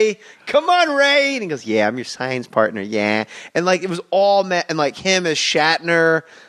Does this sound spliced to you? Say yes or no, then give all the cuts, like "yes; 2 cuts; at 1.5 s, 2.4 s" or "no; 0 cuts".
no; 0 cuts